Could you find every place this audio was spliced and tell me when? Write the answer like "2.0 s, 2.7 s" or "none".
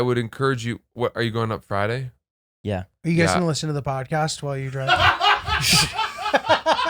none